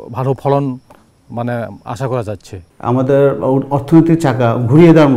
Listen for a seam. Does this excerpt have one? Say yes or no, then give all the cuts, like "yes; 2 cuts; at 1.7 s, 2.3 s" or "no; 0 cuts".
yes; 1 cut; at 2.7 s